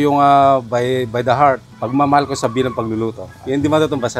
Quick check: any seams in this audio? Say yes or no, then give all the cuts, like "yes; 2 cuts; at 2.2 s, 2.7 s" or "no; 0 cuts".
no; 0 cuts